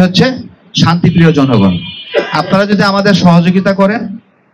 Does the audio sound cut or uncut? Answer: uncut